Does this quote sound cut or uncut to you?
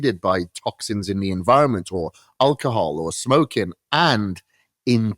uncut